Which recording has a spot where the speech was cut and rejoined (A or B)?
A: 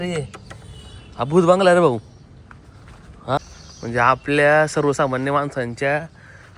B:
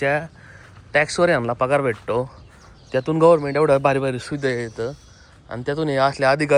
A